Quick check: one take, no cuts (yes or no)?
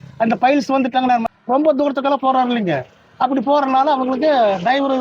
no